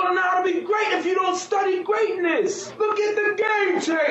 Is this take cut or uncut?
cut